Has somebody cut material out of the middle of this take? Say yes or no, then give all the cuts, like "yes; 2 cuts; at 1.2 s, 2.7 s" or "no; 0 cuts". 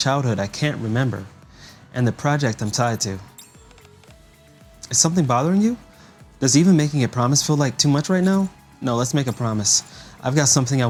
no; 0 cuts